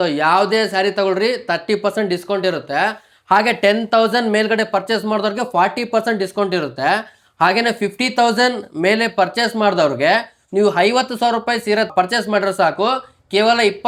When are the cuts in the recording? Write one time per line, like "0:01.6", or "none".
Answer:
none